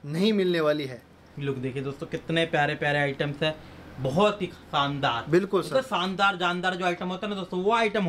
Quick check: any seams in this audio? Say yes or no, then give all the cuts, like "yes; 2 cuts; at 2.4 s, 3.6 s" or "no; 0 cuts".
no; 0 cuts